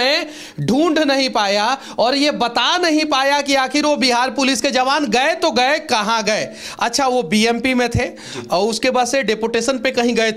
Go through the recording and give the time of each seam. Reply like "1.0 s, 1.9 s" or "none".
none